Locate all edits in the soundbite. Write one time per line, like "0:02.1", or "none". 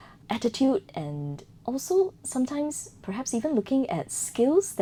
none